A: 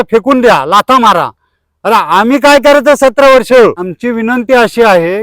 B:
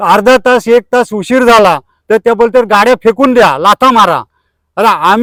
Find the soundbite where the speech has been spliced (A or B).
A